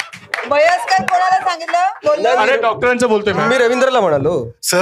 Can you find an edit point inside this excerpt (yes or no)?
no